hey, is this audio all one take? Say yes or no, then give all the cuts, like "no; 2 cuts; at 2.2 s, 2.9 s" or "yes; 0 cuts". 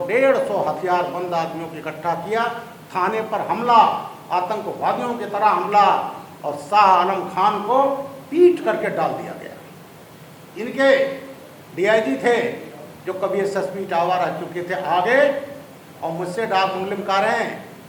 yes; 0 cuts